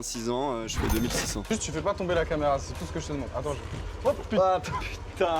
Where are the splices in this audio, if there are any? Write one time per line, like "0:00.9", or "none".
0:01.5